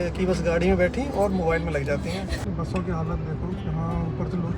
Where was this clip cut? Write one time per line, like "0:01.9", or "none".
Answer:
0:02.4